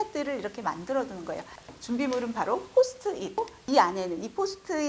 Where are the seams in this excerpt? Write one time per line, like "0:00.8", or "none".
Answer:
0:03.4